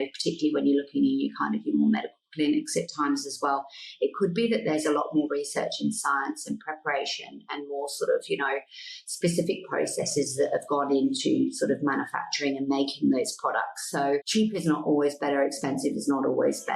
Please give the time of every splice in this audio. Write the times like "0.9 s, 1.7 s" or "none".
14.3 s